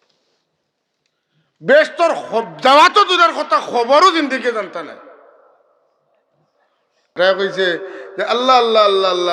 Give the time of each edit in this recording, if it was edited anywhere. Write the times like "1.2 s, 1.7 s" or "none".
7.1 s